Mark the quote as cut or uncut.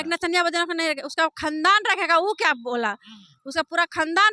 uncut